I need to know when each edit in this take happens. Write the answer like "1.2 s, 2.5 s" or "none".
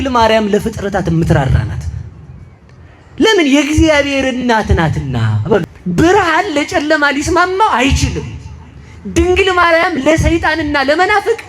5.7 s